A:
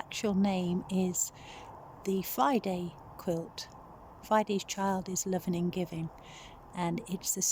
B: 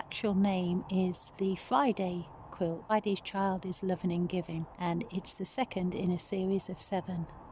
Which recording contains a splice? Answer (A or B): B